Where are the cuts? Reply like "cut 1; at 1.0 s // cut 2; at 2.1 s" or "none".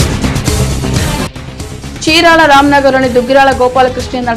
cut 1; at 1.1 s